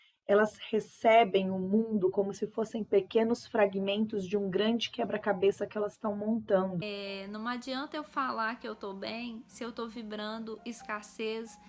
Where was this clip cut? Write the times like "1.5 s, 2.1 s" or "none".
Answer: 6.8 s